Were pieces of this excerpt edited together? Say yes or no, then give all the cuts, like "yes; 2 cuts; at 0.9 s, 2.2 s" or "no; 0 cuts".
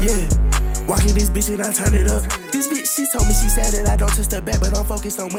no; 0 cuts